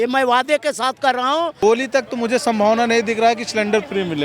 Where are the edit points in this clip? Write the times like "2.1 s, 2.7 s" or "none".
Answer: 1.5 s